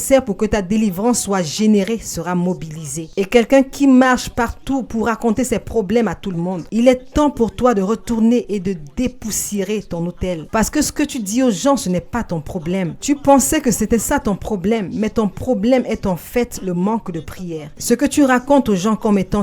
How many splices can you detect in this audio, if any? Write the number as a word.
zero